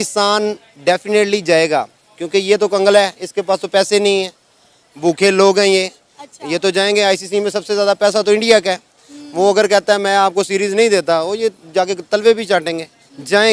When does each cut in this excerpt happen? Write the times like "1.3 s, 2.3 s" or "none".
none